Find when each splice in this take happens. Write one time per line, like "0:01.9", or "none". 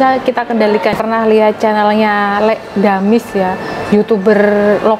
0:01.0

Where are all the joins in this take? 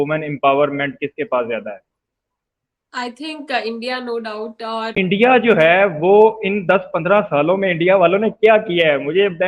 0:04.9

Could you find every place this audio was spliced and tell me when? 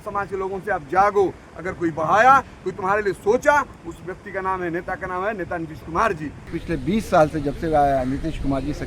0:06.5

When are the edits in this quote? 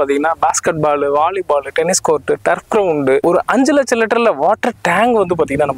0:03.2

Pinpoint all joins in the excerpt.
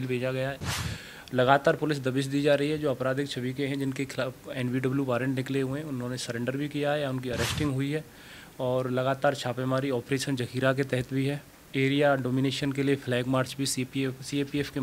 none

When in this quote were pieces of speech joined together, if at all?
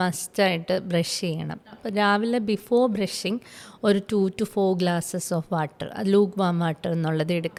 none

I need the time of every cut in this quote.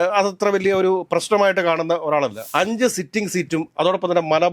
0:02.4

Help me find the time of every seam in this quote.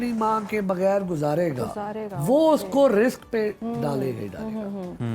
none

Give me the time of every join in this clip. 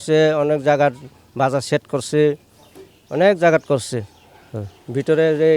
none

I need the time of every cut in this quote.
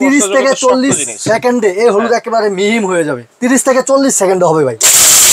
0:03.3

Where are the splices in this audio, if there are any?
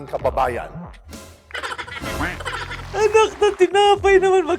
0:02.8

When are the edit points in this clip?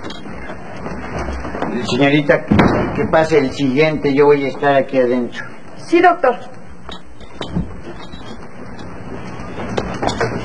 none

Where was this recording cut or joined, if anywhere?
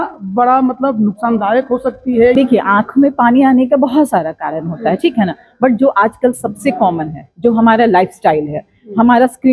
0:02.3

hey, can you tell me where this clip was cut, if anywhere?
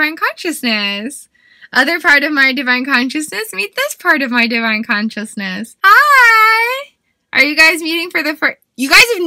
0:05.7

